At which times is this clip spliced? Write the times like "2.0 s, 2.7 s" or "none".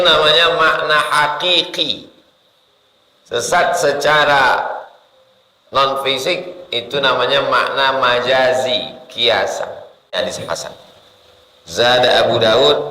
10.1 s